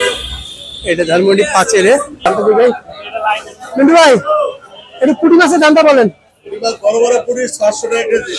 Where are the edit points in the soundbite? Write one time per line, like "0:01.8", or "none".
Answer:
0:02.3